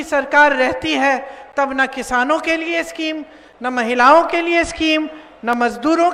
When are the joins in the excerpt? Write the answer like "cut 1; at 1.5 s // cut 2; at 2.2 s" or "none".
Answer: none